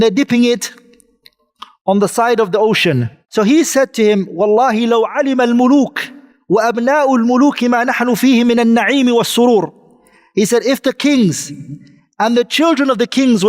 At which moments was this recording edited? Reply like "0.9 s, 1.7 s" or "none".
3.2 s

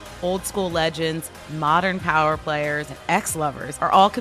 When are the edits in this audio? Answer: 3.3 s

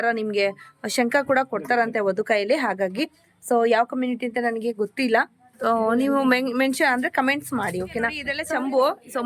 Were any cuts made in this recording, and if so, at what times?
8.3 s

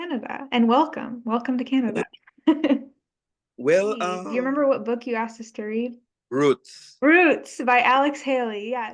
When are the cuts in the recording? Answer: 4.2 s

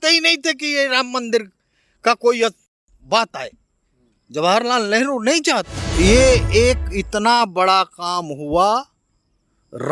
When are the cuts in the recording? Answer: 5.8 s

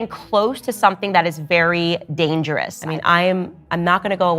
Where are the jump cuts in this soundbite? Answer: 2.8 s

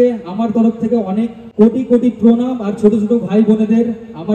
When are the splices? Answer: 1.4 s

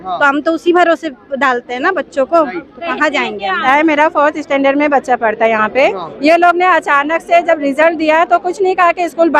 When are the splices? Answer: 3.6 s

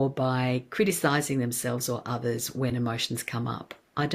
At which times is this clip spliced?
none

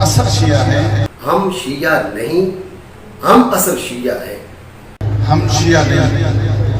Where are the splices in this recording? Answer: 1.1 s, 5.0 s

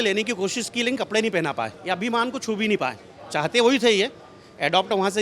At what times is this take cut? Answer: 1.8 s

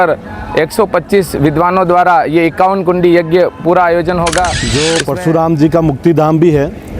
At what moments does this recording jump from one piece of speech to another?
4.6 s

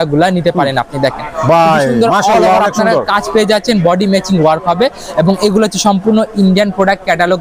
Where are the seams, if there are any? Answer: none

